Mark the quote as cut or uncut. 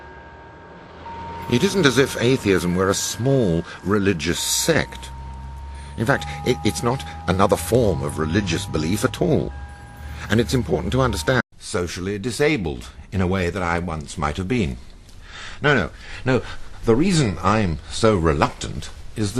uncut